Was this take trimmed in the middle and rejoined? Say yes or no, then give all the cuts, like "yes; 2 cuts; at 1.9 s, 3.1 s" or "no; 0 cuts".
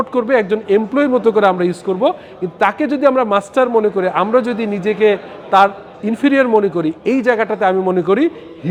no; 0 cuts